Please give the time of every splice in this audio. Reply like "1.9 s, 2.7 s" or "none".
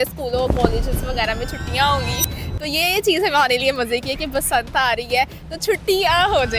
none

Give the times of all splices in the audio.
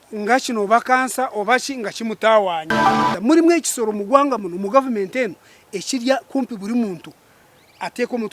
3.1 s

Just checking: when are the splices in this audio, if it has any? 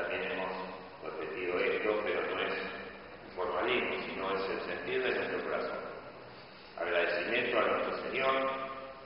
5.4 s

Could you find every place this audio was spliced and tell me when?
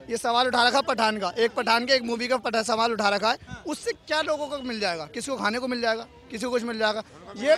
none

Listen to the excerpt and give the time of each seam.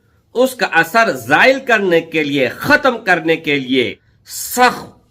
3.8 s

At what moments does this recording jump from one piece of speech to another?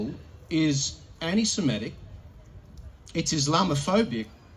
none

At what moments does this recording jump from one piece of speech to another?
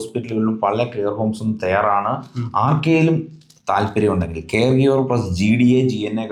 none

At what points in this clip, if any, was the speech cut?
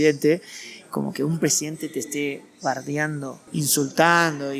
3.3 s

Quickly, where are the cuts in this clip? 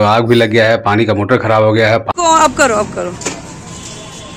2.1 s

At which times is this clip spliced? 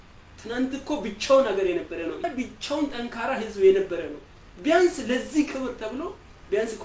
2.2 s

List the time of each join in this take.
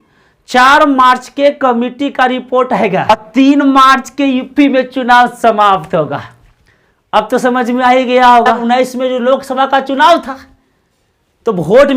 3.1 s, 8.5 s

